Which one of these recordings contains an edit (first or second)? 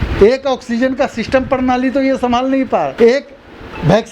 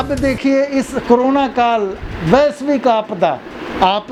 first